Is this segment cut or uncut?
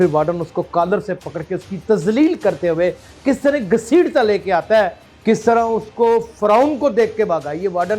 cut